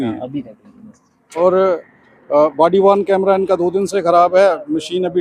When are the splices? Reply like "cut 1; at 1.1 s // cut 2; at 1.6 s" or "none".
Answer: cut 1; at 1.4 s